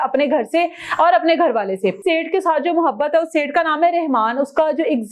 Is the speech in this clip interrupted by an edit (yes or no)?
yes